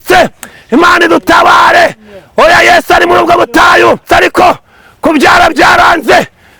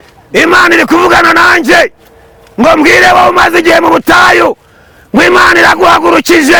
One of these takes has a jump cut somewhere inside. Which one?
first; 1 cut; at 4.0 s

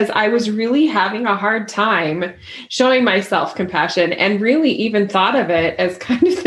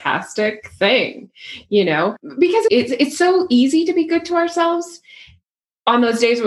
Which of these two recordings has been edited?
second; 1 cut; at 2.7 s

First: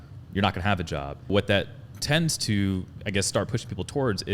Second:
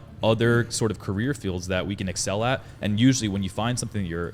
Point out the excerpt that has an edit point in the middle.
first; 1 cut; at 1.3 s

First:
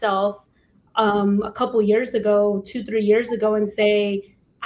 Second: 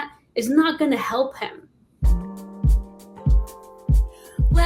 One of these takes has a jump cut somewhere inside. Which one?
second; 1 cut; at 2.1 s

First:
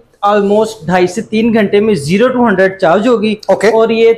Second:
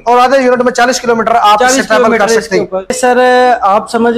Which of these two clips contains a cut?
second; 1 cut; at 3.0 s

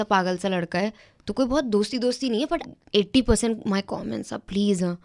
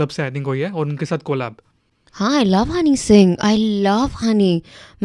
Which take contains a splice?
first; 1 cut; at 2.7 s

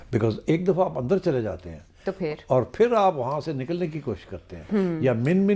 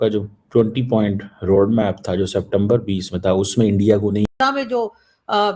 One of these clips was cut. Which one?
second; 1 cut; at 4.3 s

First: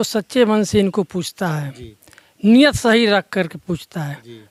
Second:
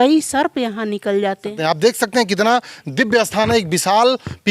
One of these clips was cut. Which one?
second; 1 cut; at 1.5 s

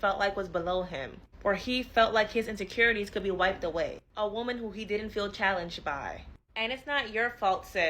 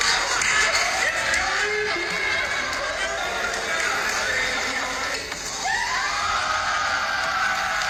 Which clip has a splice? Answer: first; 1 cut; at 4.8 s

